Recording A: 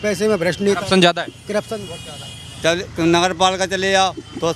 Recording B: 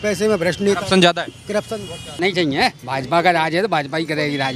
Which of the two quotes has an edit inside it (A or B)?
B